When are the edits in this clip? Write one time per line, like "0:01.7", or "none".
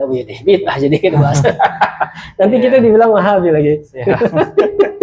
none